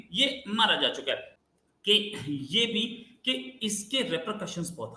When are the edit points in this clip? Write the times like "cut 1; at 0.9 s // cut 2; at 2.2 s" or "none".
none